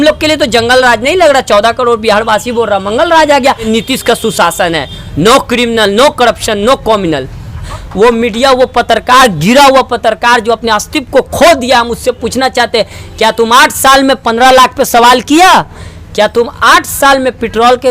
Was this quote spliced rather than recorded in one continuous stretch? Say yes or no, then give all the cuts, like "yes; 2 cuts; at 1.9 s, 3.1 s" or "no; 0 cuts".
yes; 2 cuts; at 3.7 s, 7.8 s